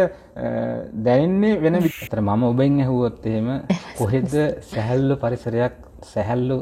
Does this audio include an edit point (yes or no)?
yes